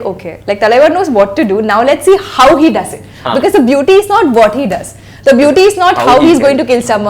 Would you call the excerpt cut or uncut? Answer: uncut